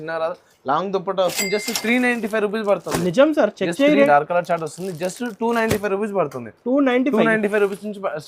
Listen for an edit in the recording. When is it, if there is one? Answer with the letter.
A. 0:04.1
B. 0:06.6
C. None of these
A